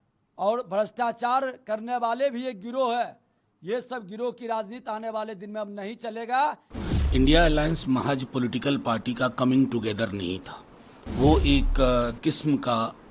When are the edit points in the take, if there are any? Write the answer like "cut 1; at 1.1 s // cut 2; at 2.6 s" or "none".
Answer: cut 1; at 6.7 s